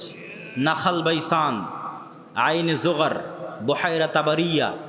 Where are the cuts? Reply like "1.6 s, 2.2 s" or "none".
none